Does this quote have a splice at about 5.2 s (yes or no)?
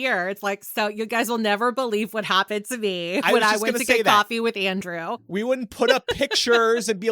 no